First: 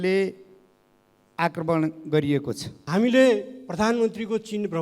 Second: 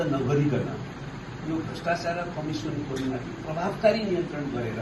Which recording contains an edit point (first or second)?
first